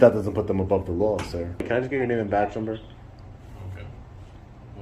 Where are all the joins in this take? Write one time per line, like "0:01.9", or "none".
0:01.6